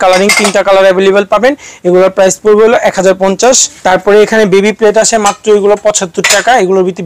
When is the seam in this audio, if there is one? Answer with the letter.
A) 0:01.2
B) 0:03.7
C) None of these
B